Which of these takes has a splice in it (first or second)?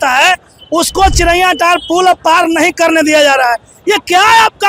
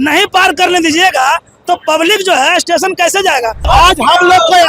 second